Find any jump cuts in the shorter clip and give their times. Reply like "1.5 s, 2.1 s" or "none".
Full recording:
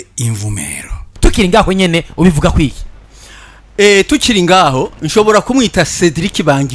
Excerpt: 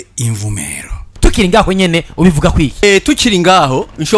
2.8 s